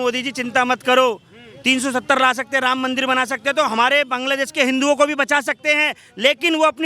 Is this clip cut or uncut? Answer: uncut